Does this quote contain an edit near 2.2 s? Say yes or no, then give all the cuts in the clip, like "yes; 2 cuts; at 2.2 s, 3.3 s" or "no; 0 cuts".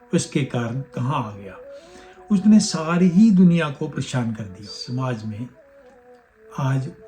no; 1 cut; at 4.7 s